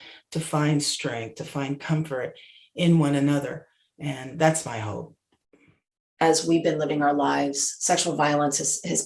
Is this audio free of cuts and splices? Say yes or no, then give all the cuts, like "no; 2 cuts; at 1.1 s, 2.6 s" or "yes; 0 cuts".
no; 1 cut; at 5.8 s